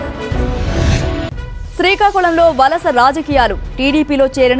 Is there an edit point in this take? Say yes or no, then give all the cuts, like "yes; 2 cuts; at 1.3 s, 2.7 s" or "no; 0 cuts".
yes; 1 cut; at 1.0 s